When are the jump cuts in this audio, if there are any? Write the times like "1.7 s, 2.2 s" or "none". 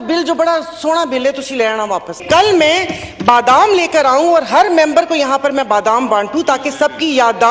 2.2 s